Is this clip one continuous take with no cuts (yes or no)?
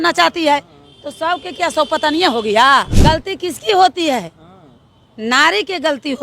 no